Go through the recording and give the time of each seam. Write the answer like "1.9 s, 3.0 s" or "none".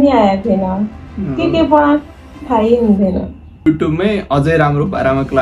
3.6 s